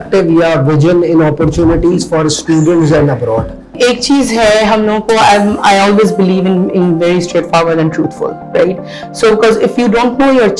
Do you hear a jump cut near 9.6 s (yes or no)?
no